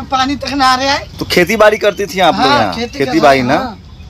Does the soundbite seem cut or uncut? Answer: cut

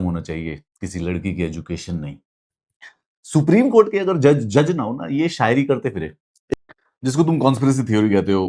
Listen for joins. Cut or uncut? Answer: cut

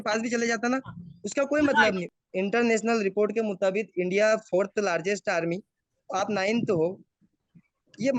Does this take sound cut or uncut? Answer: cut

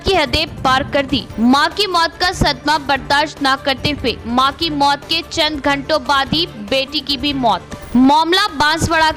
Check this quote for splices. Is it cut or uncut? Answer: uncut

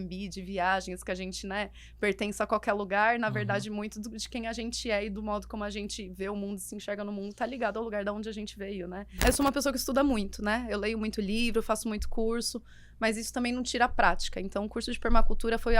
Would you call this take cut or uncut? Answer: cut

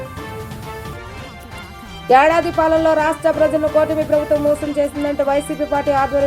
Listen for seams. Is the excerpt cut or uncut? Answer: cut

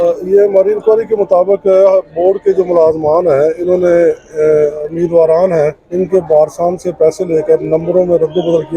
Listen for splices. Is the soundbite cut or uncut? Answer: cut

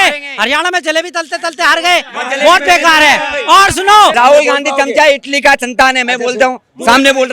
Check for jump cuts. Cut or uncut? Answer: cut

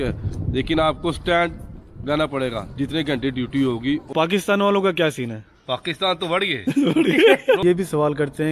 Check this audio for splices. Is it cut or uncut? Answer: cut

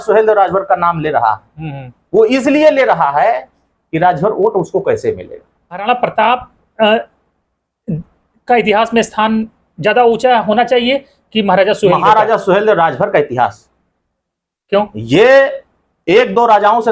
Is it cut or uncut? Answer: cut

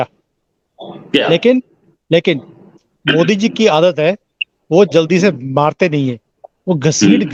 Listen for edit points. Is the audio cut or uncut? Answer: uncut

